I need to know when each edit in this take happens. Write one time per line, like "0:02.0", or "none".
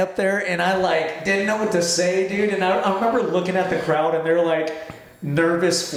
none